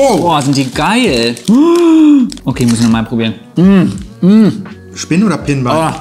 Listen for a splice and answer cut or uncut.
uncut